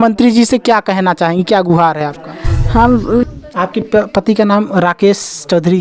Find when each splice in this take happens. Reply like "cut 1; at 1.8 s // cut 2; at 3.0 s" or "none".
cut 1; at 3.2 s